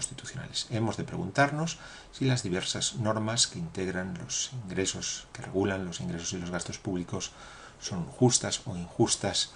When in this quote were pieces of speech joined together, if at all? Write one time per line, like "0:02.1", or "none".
0:02.4

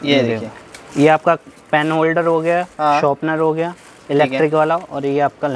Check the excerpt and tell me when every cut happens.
none

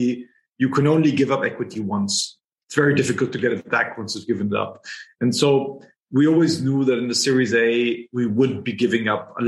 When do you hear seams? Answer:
none

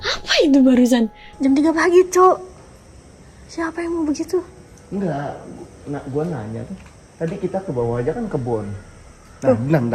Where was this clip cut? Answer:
0:01.2

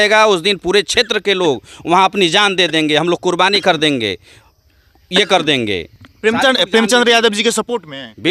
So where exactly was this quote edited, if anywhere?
none

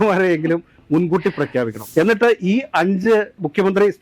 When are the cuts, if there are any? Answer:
0:01.8

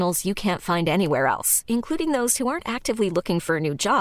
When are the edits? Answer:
none

